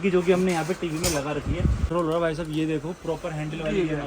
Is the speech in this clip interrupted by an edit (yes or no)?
yes